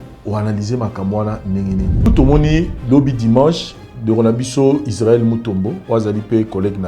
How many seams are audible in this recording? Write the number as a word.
one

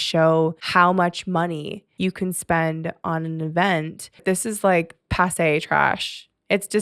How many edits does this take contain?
one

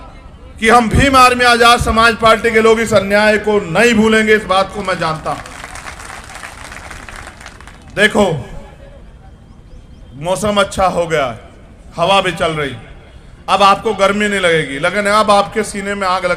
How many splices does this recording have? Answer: zero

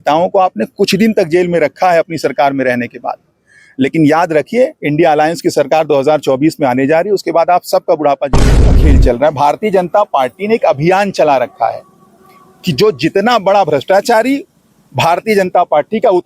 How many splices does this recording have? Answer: one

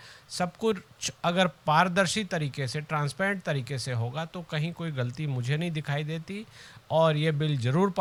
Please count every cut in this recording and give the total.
zero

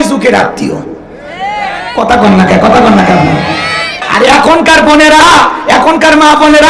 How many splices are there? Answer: one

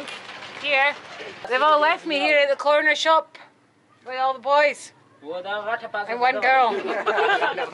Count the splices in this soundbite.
one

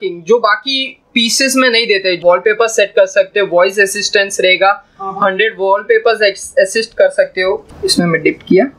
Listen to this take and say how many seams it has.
two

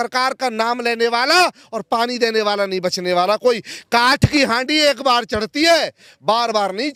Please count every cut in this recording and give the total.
zero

